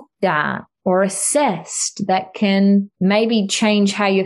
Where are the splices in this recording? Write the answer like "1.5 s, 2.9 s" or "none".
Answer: 2.9 s